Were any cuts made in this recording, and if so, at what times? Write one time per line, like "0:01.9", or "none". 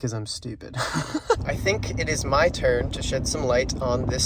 0:01.4